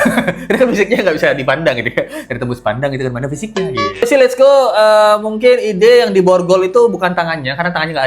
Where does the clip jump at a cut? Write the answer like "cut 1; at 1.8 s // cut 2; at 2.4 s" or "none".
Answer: cut 1; at 4.0 s